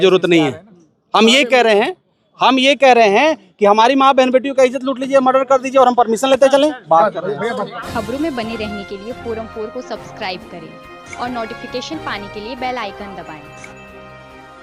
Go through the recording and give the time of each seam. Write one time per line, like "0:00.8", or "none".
none